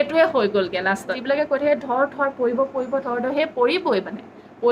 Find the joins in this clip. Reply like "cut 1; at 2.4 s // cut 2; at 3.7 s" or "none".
cut 1; at 1.2 s